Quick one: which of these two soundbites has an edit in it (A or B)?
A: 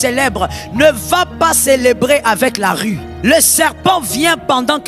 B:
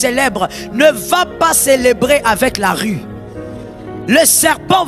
A